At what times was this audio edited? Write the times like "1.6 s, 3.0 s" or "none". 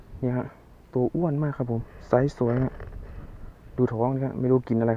none